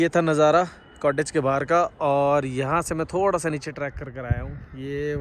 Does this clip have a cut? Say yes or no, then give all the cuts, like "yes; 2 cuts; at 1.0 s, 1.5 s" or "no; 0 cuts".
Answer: no; 0 cuts